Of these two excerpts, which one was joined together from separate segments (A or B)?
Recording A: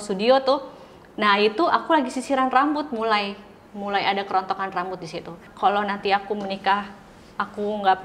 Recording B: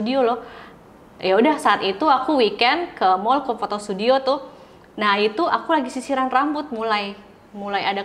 A